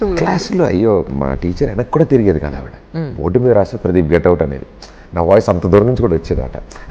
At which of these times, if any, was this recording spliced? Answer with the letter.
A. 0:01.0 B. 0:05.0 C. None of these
C